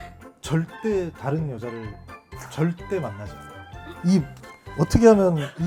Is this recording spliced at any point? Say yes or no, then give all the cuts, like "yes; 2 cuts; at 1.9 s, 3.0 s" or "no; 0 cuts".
no; 0 cuts